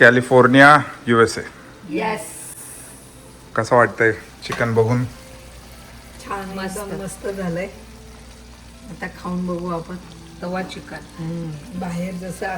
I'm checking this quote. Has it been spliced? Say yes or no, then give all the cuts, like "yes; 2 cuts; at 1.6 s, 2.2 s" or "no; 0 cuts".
no; 0 cuts